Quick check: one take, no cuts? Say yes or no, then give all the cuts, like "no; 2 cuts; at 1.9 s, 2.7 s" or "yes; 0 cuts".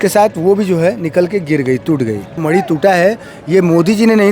no; 1 cut; at 2.3 s